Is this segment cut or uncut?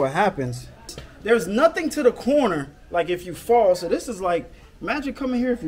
cut